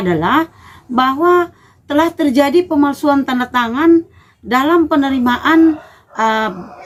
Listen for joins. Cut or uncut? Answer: uncut